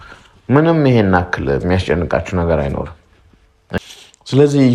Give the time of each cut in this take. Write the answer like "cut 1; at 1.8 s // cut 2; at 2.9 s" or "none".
cut 1; at 3.8 s